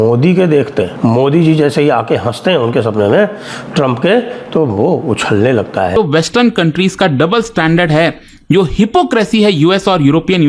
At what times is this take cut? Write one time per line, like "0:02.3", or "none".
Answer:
0:00.9
0:06.0